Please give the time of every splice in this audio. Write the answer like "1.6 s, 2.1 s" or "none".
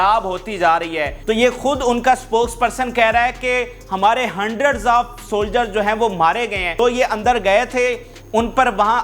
1.2 s, 6.8 s

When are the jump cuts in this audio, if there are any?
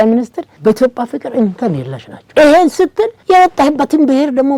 none

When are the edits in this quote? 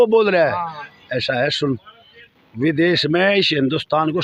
none

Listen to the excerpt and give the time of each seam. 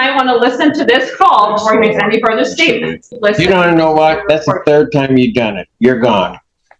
3.2 s

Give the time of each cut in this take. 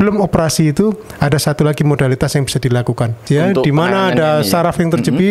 3.2 s

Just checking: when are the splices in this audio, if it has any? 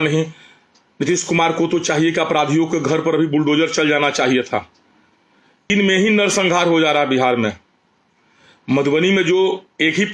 5.7 s

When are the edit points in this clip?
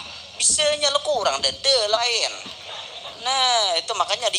2.0 s

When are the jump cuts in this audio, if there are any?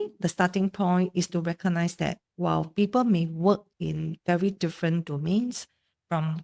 none

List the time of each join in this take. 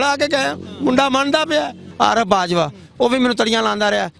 1.8 s

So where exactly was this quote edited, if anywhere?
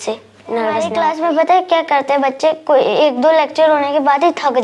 0.9 s

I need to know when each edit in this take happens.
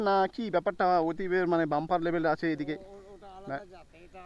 none

